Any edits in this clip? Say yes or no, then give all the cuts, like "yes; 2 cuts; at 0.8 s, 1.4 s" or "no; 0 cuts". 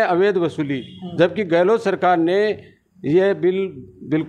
no; 0 cuts